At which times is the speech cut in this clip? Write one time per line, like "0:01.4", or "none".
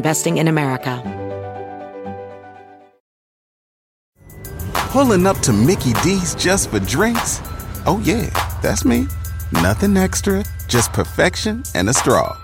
0:01.0